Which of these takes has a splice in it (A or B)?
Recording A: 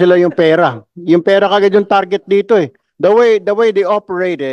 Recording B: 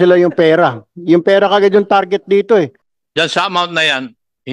B